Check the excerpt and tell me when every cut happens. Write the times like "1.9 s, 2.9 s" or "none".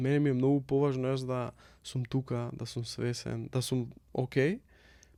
none

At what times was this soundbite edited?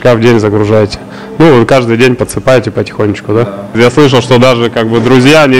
3.8 s

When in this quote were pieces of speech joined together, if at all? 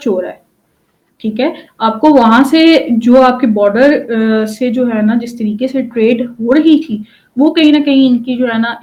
none

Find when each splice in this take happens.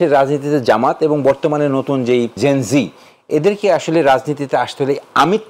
2.3 s

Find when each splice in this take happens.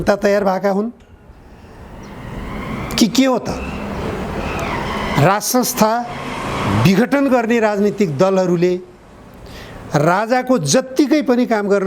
none

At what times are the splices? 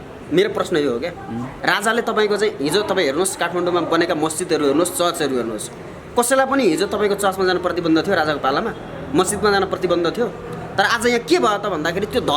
1.5 s

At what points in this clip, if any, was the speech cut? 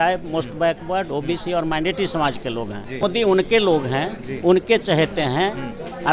3.0 s

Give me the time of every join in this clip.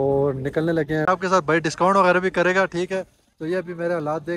1.0 s

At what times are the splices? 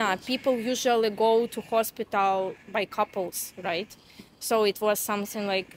none

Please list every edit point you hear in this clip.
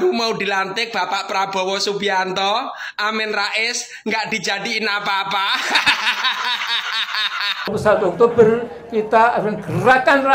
7.8 s

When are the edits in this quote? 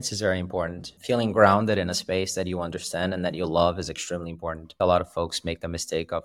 0.9 s, 4.7 s

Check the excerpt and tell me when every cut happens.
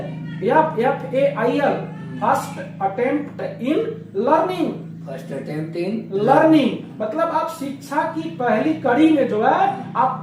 none

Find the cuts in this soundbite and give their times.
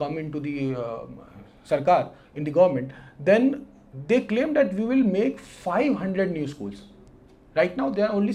none

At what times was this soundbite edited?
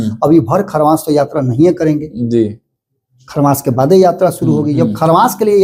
none

